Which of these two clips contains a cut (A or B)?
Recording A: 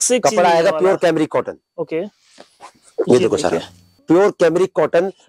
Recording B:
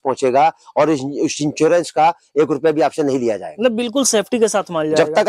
A